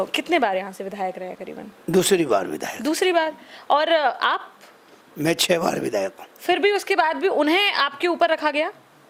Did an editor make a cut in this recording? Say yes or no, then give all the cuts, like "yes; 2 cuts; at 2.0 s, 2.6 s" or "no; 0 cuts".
no; 0 cuts